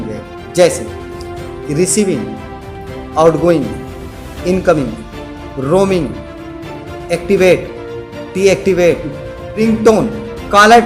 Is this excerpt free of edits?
no; 1 cut; at 9.6 s

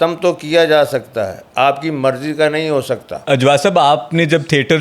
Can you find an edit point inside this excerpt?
yes; 1 cut; at 3.1 s

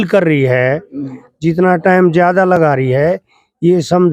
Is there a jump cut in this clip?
no; 0 cuts

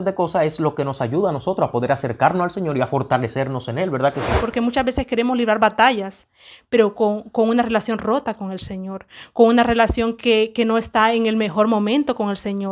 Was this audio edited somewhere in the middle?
yes; 1 cut; at 4.4 s

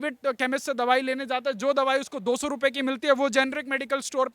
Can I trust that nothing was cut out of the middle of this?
yes; 0 cuts

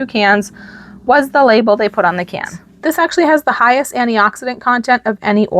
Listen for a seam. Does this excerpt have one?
yes; 1 cut; at 2.8 s

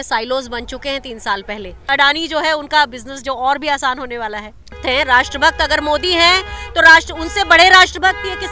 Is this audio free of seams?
no; 2 cuts; at 1.9 s, 4.8 s

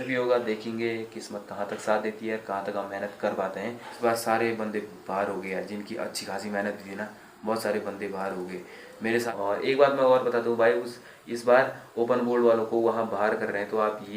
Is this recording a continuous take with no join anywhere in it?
no; 2 cuts; at 4.0 s, 9.1 s

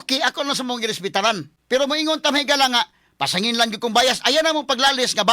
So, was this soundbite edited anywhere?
yes; 1 cut; at 1.5 s

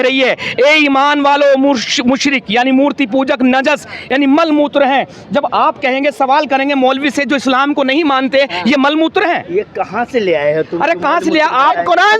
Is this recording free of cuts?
yes; 0 cuts

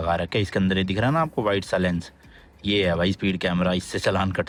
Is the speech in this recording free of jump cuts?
yes; 0 cuts

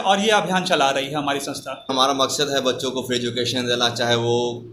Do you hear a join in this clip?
yes; 1 cut; at 1.9 s

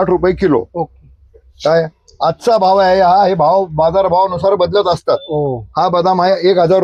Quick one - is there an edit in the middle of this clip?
no; 0 cuts

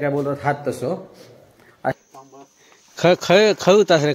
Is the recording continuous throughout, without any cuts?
no; 1 cut; at 1.9 s

